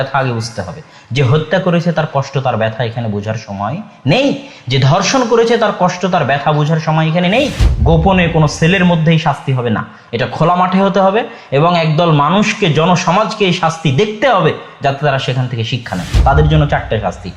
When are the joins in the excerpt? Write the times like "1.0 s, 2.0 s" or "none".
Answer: 7.7 s, 16.2 s